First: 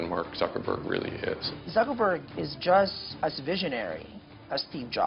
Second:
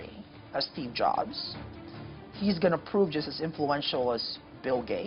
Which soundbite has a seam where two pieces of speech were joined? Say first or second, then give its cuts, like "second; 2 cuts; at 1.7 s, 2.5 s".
first; 2 cuts; at 1.5 s, 3.0 s